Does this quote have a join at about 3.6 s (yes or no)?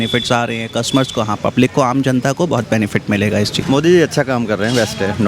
yes